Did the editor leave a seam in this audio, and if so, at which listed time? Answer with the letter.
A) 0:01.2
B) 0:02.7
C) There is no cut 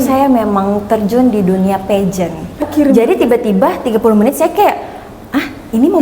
B